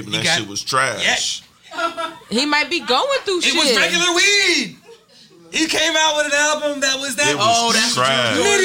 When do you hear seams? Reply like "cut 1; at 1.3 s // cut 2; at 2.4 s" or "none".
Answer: none